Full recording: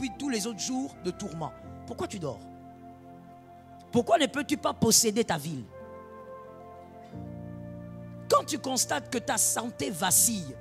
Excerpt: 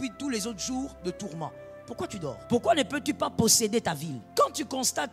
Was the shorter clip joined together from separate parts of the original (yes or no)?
yes